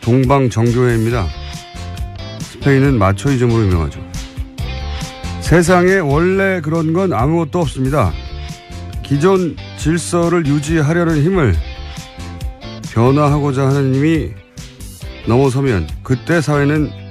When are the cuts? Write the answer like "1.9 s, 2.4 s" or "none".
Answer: 5.8 s